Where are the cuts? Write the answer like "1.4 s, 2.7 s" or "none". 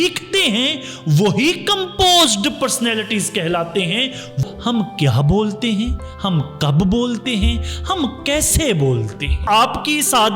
4.4 s, 9.4 s